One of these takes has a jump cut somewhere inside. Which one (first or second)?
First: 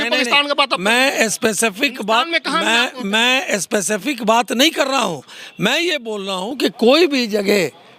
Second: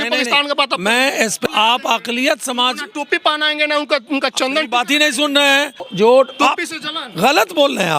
second